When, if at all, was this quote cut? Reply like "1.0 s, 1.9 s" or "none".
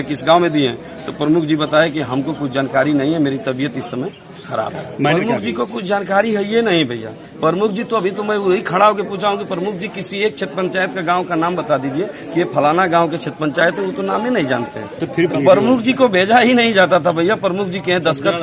5.1 s, 15.3 s